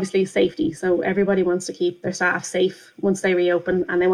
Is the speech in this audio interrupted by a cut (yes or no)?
no